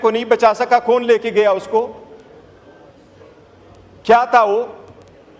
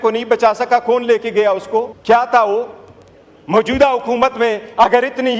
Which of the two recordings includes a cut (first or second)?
second